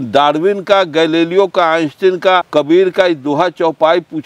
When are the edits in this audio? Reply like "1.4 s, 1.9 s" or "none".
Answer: 2.5 s